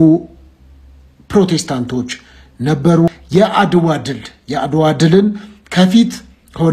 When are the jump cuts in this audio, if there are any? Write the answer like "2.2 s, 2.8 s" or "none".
3.2 s